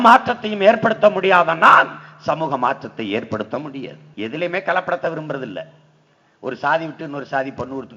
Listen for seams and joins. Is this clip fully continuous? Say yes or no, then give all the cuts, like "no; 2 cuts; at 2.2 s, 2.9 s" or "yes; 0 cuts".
no; 1 cut; at 4.0 s